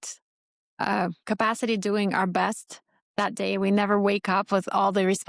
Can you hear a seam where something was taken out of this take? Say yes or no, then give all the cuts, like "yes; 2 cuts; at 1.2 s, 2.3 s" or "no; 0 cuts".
no; 0 cuts